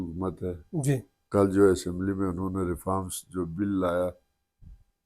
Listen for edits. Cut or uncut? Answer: cut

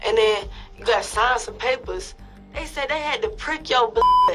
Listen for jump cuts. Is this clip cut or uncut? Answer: uncut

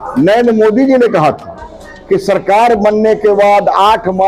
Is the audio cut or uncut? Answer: uncut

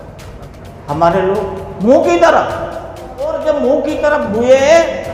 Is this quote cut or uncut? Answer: cut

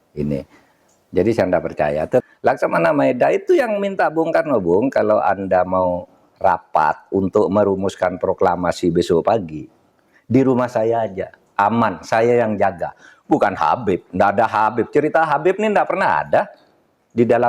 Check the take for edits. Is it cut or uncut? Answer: cut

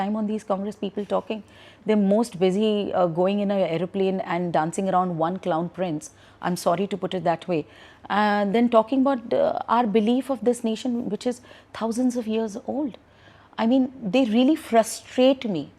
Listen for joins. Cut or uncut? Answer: uncut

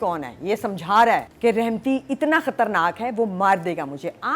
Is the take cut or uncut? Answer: cut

